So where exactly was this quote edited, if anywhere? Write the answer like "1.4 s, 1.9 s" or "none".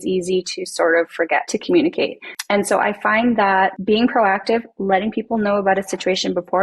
1.5 s, 2.3 s, 3.8 s

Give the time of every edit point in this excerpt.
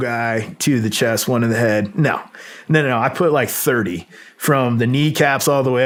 none

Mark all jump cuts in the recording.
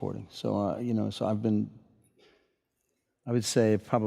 1.8 s

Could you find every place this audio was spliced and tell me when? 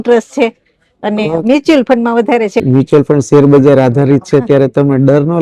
2.6 s

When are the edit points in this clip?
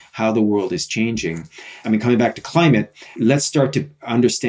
1.7 s, 3.2 s

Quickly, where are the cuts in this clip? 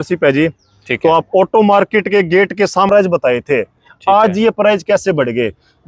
2.9 s

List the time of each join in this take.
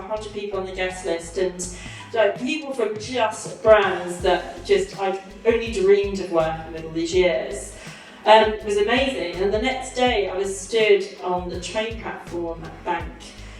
none

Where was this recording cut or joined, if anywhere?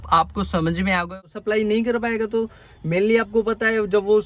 1.1 s

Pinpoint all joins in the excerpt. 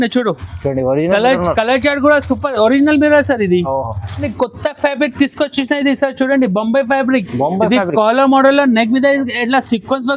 4.3 s

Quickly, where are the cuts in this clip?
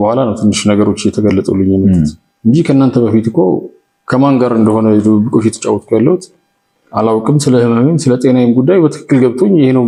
none

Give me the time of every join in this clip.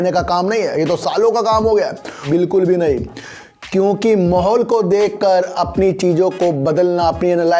2.2 s

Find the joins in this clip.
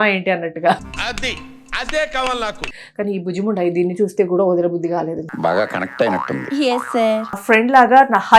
2.6 s, 7.4 s

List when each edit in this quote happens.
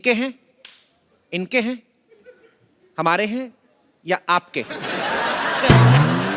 none

